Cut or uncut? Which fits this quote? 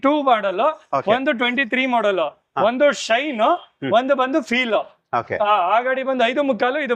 uncut